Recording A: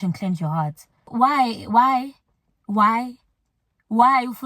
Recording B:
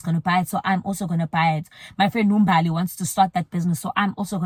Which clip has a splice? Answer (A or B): A